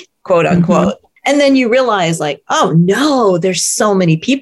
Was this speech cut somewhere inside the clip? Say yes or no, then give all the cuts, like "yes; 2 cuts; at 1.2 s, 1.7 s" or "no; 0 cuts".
yes; 1 cut; at 1.1 s